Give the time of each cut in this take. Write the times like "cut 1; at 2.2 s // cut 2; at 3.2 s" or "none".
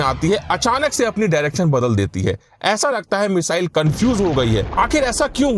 cut 1; at 4.7 s